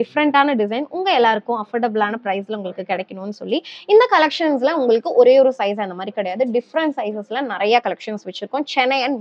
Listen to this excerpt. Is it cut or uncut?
uncut